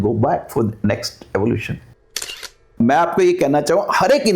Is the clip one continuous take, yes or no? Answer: no